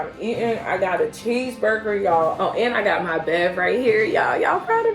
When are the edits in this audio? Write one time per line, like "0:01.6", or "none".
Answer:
0:02.4